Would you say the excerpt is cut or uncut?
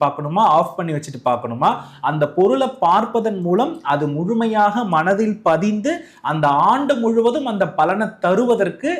uncut